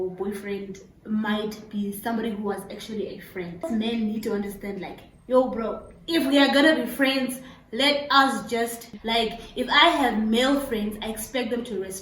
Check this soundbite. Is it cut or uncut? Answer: cut